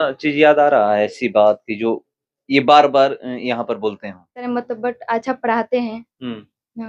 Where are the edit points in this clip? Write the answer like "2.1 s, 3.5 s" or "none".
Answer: 4.5 s